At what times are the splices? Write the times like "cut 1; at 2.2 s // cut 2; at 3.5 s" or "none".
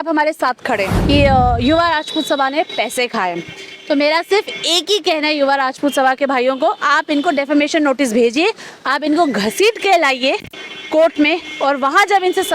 cut 1; at 0.9 s